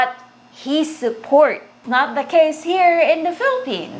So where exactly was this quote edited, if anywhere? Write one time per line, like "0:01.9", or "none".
0:01.8